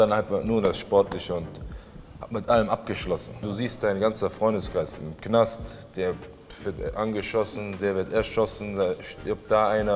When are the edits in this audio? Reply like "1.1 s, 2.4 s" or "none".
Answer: 3.5 s